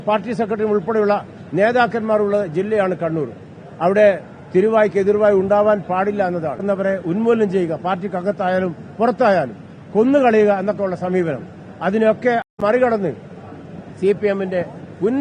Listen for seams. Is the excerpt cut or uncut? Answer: cut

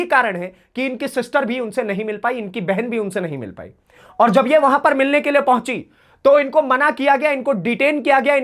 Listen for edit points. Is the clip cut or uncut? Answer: uncut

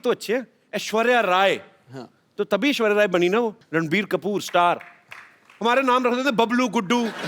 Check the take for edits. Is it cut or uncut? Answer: cut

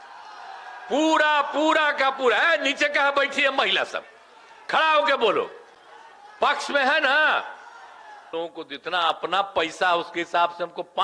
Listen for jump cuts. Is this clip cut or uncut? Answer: cut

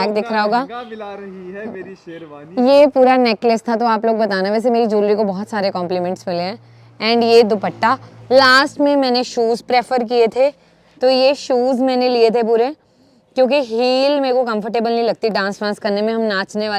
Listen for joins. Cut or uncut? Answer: uncut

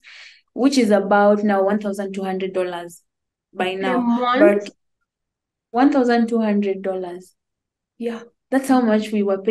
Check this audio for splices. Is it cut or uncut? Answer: cut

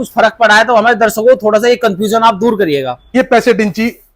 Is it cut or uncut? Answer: cut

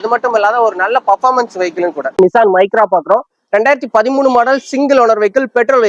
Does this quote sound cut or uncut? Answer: cut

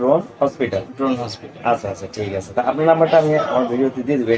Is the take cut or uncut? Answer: uncut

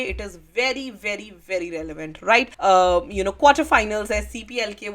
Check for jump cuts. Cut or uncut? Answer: cut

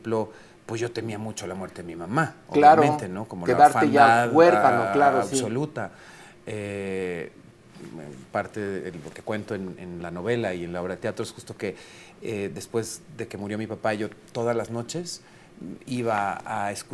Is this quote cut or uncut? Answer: uncut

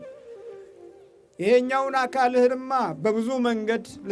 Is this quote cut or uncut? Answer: uncut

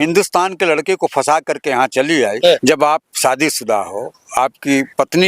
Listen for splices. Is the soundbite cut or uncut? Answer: cut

